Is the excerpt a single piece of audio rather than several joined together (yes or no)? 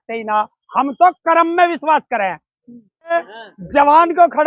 no